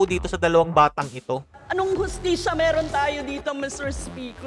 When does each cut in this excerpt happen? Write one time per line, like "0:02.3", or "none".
0:01.5